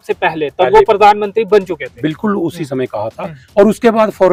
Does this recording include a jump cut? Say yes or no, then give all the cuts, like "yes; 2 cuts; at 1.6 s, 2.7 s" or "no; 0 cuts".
no; 0 cuts